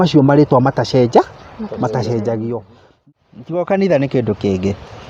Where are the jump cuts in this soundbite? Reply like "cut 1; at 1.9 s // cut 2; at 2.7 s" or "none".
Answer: cut 1; at 3.0 s